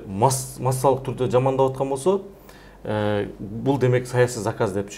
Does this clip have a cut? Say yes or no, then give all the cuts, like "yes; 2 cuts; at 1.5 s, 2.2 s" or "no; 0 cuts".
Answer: no; 0 cuts